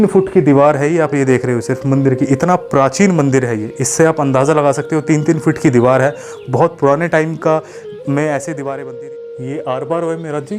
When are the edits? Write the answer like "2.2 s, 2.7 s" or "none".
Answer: 8.9 s